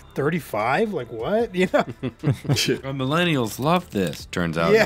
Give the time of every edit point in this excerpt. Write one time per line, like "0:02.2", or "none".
none